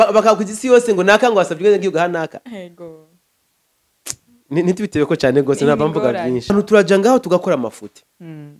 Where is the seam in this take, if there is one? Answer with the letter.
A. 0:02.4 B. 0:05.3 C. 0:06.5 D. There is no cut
C